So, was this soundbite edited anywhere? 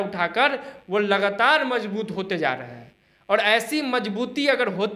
no; 0 cuts

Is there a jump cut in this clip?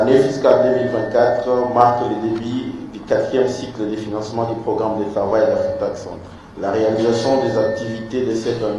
no; 0 cuts

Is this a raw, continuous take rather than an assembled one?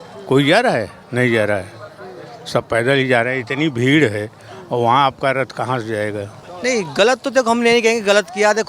no; 1 cut; at 6.4 s

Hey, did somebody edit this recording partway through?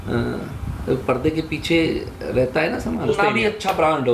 yes; 1 cut; at 3.1 s

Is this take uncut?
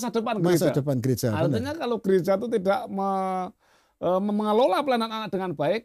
yes; 0 cuts

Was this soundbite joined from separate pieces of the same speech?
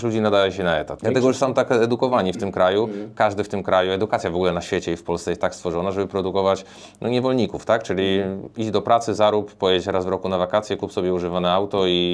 yes; 1 cut; at 0.9 s

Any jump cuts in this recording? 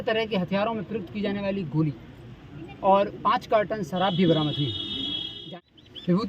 yes; 1 cut; at 5.4 s

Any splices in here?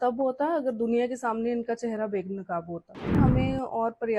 yes; 1 cut; at 3.2 s

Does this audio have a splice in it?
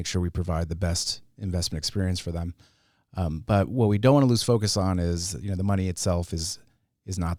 no; 0 cuts

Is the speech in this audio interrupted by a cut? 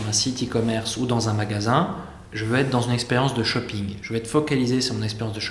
no; 0 cuts

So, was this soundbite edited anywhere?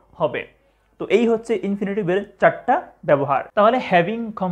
yes; 1 cut; at 3.5 s

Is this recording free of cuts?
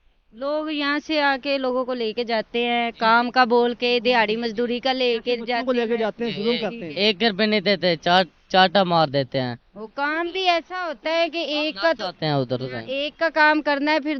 yes; 0 cuts

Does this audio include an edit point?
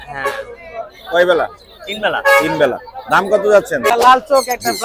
yes; 1 cut; at 3.9 s

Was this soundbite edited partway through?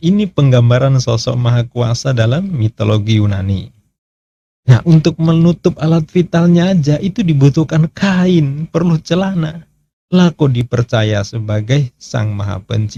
no; 0 cuts

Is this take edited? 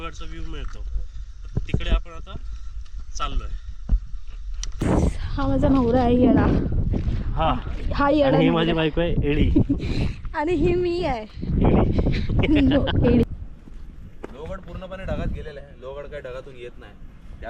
yes; 2 cuts; at 4.8 s, 13.2 s

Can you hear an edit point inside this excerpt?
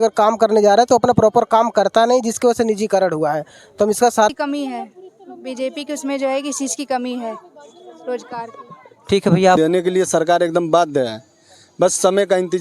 yes; 2 cuts; at 4.3 s, 9.6 s

